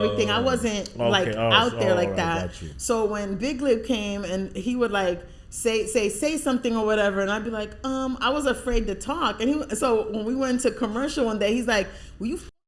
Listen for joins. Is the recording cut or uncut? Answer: uncut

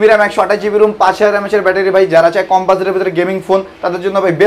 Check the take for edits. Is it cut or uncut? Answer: uncut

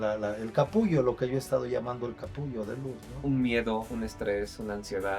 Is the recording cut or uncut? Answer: cut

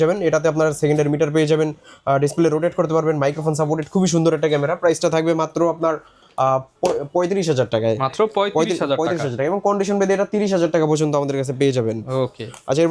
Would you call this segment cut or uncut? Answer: uncut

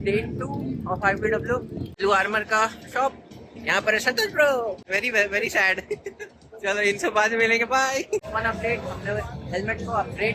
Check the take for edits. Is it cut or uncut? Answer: cut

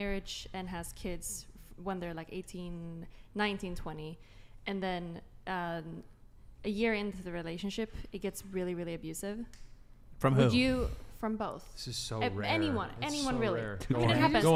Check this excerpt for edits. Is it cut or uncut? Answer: uncut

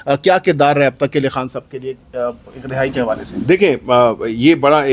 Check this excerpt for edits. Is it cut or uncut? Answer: uncut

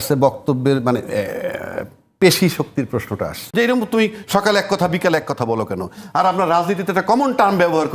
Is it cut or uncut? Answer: cut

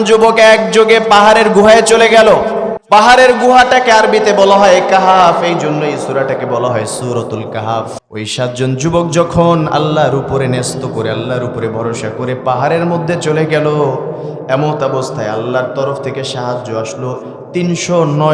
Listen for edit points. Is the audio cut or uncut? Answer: cut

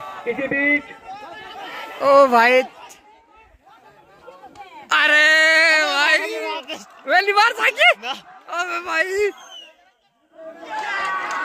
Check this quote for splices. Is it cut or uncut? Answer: uncut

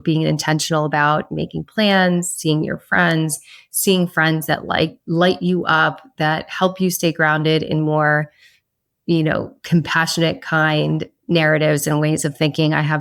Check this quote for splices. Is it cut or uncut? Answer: uncut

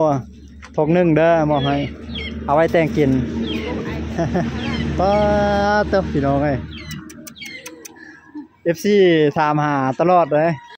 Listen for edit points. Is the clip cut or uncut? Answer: uncut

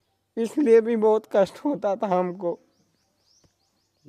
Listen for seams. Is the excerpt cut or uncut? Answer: uncut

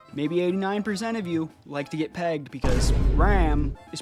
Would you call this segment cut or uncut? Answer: uncut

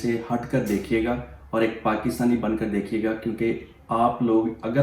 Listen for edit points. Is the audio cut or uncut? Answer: uncut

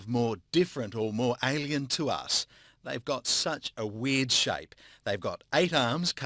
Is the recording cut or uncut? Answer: cut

